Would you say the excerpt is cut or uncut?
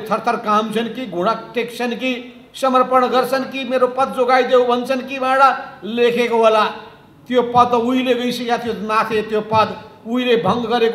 uncut